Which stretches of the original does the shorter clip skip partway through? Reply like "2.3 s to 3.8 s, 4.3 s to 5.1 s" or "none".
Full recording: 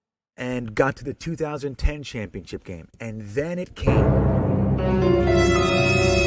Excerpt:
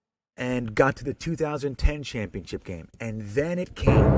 none

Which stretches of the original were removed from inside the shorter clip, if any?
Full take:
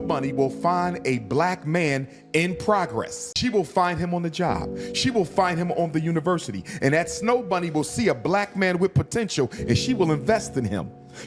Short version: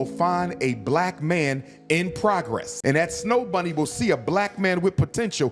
3.2 s to 6.7 s

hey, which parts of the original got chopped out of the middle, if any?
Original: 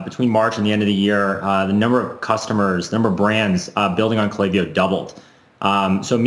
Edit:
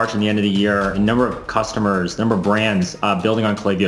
1.4 s to 1.7 s

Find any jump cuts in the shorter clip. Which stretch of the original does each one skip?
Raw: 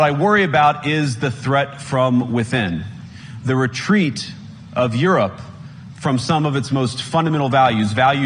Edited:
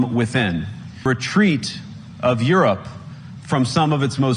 3.2 s to 3.6 s

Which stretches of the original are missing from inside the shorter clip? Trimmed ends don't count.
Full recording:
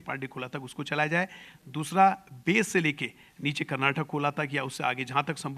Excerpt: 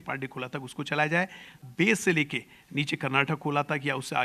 1.6 s to 2.3 s

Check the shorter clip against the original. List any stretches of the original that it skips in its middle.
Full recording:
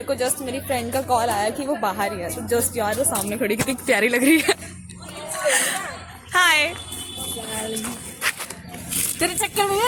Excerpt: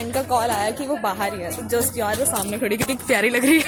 none

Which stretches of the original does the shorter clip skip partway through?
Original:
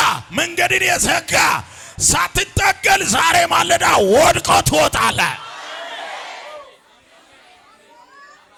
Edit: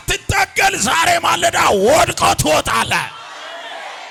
none

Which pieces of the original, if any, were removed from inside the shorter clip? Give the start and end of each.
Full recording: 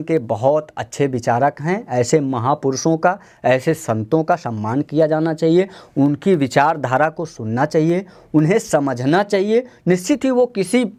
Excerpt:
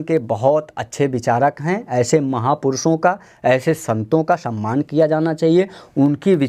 none

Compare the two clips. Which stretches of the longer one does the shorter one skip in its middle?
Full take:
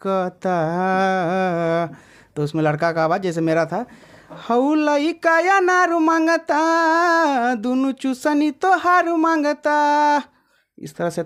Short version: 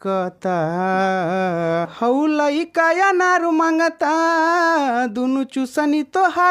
1.9 s to 4.4 s

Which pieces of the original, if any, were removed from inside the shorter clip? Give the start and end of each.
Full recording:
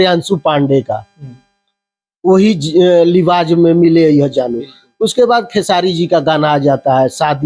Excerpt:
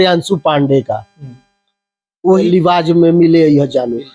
2.4 s to 3.0 s

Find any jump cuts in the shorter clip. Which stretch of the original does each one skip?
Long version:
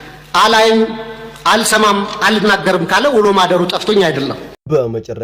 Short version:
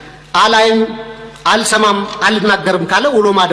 none

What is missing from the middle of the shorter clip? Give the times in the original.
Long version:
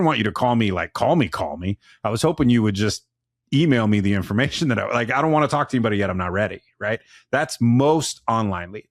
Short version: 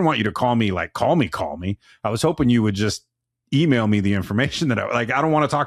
none

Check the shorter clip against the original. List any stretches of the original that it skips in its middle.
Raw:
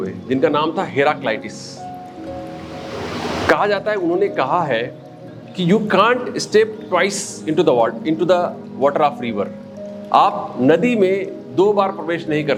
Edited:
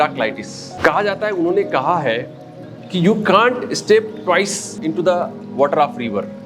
1.8 s to 3.4 s, 7.4 s to 8.0 s

